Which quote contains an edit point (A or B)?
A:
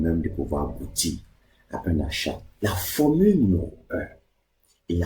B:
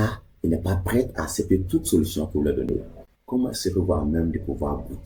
A